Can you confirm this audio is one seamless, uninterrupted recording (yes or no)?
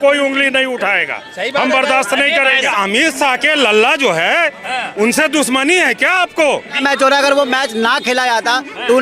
no